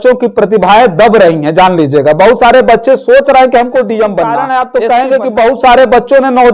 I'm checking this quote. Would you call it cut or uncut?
cut